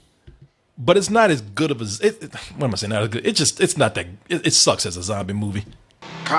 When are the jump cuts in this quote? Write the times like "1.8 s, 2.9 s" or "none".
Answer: none